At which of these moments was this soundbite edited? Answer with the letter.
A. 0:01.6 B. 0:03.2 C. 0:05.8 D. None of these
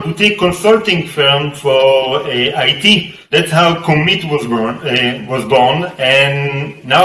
B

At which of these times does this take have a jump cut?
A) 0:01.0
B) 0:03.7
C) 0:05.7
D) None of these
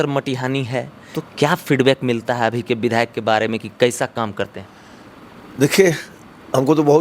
A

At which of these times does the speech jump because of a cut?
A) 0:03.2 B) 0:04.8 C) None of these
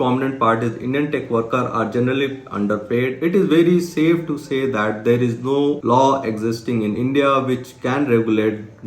A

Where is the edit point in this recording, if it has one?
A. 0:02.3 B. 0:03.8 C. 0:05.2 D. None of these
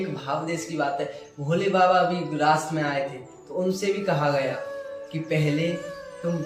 D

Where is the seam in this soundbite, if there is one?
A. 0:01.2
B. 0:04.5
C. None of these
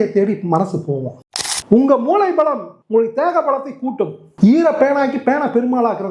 A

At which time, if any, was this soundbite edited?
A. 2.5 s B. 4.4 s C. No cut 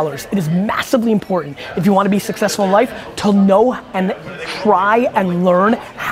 C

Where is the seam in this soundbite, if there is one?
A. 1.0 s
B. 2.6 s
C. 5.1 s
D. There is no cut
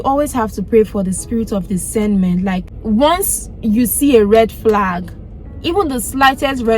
B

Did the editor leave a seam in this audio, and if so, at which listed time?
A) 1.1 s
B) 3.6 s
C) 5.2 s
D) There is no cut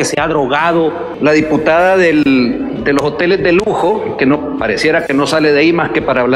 A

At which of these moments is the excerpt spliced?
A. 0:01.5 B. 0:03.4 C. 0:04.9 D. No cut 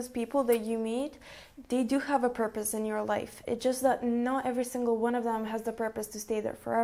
D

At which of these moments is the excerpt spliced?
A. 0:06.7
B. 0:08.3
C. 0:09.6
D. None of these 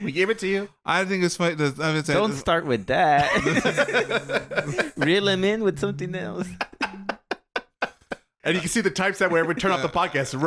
B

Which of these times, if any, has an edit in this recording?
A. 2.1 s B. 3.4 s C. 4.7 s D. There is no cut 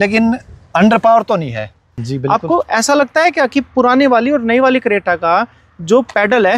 A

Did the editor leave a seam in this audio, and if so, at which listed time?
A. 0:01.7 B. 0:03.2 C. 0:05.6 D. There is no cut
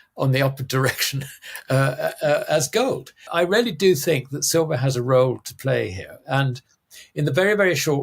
B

